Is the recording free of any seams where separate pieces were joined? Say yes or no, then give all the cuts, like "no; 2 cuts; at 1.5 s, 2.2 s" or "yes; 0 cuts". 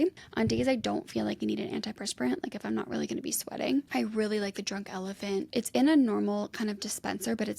no; 2 cuts; at 3.9 s, 5.5 s